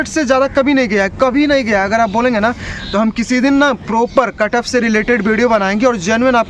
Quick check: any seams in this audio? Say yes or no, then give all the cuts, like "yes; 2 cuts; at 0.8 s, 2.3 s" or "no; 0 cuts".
no; 0 cuts